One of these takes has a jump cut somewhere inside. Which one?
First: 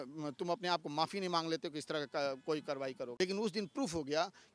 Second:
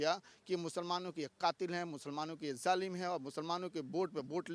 first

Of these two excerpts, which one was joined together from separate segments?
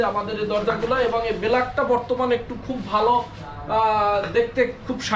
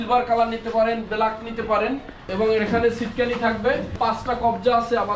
second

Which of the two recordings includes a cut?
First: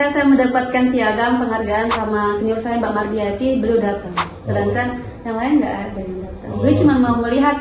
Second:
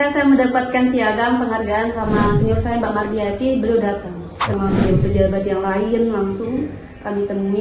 second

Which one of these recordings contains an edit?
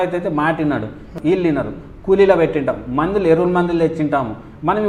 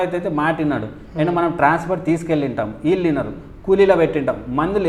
first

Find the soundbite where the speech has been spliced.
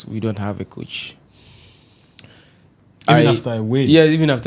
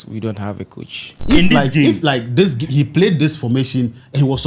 second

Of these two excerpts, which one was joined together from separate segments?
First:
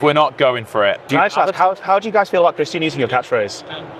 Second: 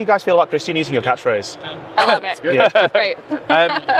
first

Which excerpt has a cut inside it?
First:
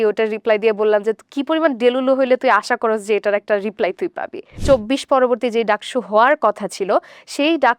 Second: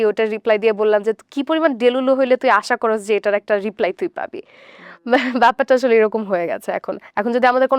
first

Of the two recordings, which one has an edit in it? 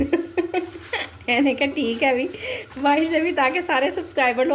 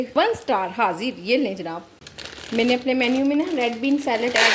second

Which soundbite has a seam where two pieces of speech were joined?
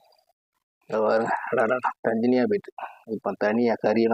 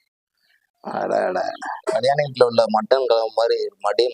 second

